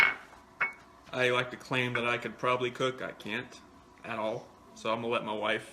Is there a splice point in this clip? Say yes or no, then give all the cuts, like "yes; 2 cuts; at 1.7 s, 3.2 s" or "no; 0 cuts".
no; 0 cuts